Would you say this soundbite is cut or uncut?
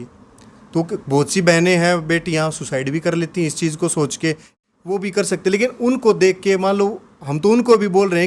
cut